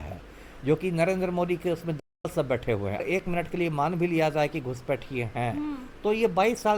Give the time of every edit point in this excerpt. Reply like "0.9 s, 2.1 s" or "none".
3.0 s